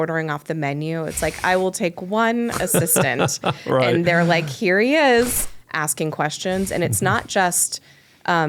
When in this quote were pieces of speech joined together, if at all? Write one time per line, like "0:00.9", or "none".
0:05.4